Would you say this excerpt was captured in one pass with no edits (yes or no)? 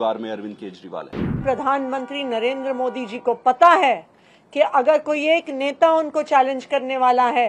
no